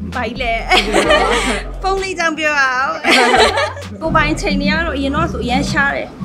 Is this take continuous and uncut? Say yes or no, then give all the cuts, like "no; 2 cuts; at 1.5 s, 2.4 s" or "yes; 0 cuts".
no; 1 cut; at 3.9 s